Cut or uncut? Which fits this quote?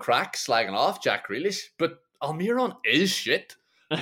uncut